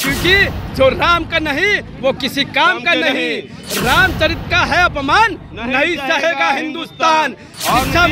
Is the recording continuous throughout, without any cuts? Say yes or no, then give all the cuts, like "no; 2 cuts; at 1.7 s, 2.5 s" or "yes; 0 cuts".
yes; 0 cuts